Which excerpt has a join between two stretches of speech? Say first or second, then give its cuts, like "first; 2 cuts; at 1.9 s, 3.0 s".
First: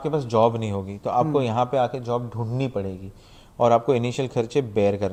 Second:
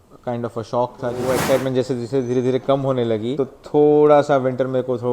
second; 2 cuts; at 1.3 s, 3.4 s